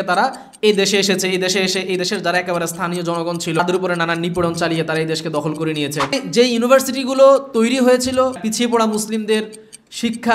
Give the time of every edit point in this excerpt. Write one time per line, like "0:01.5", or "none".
0:03.6
0:06.1
0:08.4